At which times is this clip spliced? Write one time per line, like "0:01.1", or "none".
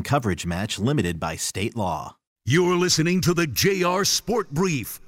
0:02.4